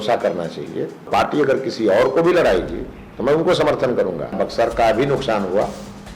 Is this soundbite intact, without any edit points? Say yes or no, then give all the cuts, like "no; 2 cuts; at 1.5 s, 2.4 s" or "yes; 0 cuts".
no; 2 cuts; at 1.1 s, 4.4 s